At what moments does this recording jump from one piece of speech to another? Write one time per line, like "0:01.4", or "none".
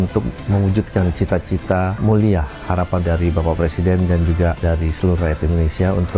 none